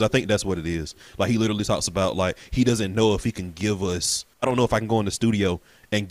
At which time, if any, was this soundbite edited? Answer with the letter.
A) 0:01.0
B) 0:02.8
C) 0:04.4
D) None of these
C